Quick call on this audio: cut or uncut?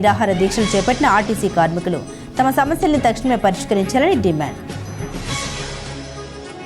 cut